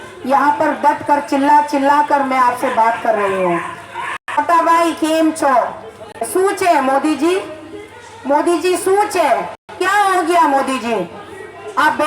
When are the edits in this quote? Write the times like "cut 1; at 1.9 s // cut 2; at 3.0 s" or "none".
cut 1; at 4.4 s // cut 2; at 6.3 s // cut 3; at 9.8 s